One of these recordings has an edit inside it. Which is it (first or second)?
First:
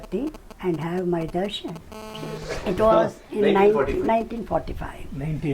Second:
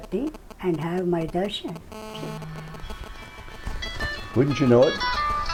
first